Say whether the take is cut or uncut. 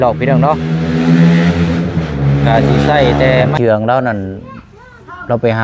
cut